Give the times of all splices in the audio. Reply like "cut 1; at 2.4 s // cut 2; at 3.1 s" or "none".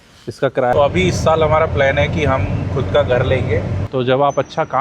cut 1; at 0.7 s // cut 2; at 3.8 s